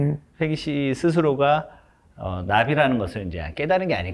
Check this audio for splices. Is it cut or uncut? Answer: uncut